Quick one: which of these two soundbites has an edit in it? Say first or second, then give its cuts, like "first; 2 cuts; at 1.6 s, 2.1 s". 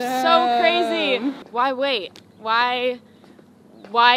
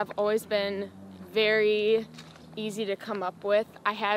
first; 1 cut; at 1.4 s